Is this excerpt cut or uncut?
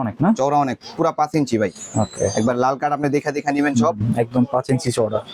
uncut